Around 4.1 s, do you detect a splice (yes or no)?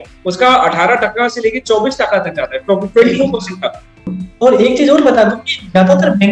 yes